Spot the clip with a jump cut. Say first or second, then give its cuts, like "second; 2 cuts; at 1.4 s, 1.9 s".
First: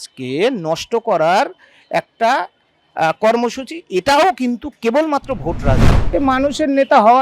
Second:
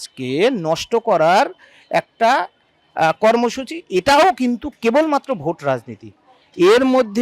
first; 1 cut; at 5.9 s